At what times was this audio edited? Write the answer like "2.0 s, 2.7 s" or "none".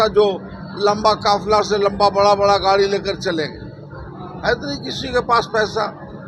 none